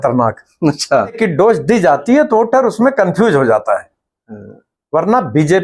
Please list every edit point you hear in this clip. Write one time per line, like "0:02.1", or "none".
0:01.2

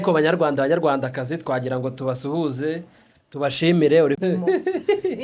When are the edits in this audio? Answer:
0:04.2

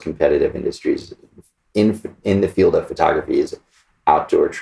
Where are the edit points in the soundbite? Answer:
none

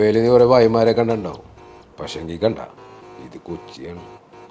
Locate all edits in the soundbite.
none

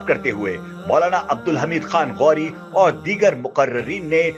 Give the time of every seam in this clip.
none

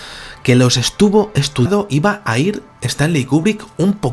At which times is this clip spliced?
none

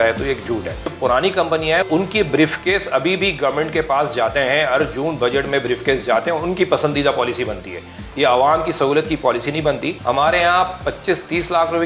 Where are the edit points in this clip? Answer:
0:00.9
0:01.9
0:09.9

